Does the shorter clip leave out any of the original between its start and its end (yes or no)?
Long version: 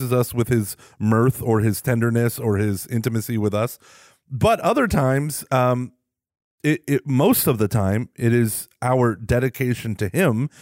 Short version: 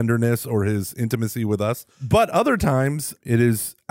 yes